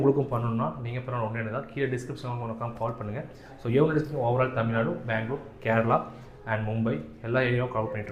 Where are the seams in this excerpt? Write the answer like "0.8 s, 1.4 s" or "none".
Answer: none